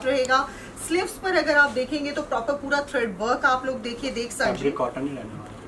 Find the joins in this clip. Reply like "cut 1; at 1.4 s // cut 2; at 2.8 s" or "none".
cut 1; at 4.4 s